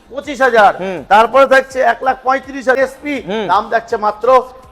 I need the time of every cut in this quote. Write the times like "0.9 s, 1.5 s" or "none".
2.8 s